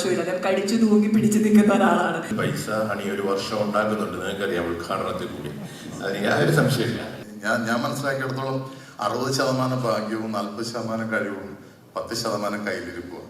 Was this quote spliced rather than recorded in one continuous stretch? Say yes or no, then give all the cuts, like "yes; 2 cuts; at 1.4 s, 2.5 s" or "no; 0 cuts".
yes; 2 cuts; at 2.3 s, 7.1 s